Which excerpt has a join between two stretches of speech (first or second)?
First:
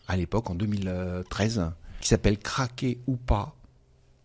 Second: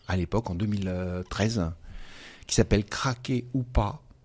first